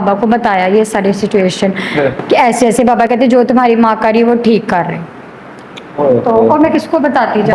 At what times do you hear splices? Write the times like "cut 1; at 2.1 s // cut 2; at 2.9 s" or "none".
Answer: none